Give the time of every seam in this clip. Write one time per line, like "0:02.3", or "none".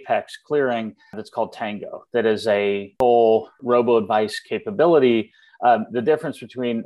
0:01.2
0:02.9
0:03.5

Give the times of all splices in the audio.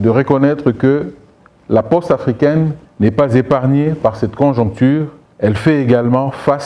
0:02.8
0:05.2

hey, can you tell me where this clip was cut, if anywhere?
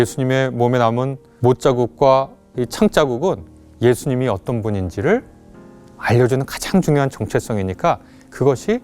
0:01.2

